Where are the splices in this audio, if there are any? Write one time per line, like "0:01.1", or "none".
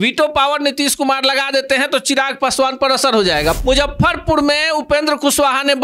0:03.6